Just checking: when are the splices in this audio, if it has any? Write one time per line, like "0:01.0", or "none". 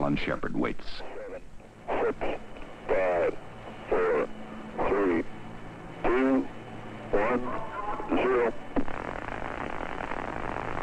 none